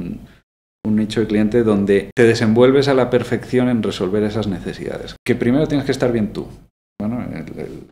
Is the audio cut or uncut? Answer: cut